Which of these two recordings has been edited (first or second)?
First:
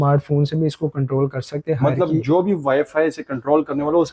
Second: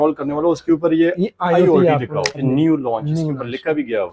second